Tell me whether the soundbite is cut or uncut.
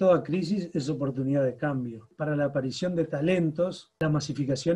cut